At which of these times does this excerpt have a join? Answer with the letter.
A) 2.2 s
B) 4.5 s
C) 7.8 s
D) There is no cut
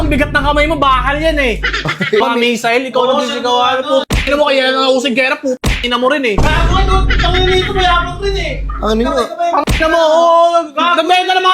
A